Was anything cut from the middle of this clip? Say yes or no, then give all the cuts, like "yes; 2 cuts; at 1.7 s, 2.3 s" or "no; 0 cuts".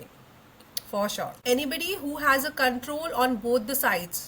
yes; 1 cut; at 1.4 s